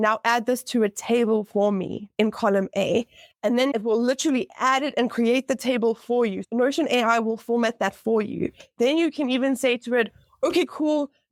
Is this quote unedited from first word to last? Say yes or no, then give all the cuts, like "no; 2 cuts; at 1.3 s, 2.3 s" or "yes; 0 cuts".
yes; 0 cuts